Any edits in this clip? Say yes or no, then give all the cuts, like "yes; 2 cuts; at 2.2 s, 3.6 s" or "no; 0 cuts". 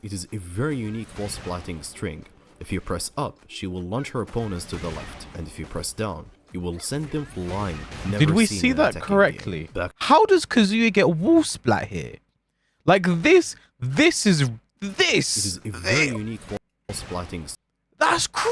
yes; 2 cuts; at 7.9 s, 9.9 s